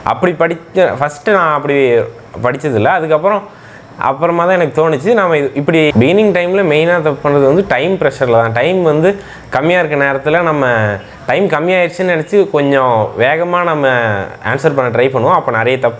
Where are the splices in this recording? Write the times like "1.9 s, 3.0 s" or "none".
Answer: 5.9 s